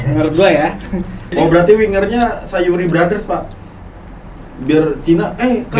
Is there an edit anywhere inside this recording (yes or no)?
yes